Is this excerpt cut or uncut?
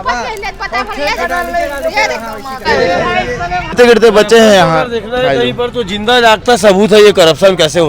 cut